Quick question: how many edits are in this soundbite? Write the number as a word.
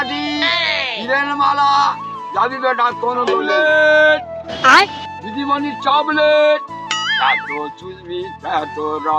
one